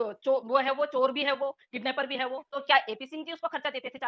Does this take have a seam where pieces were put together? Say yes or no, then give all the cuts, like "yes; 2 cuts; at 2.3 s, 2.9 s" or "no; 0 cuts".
yes; 1 cut; at 2.4 s